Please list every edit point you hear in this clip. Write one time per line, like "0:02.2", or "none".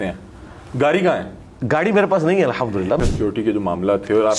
0:03.0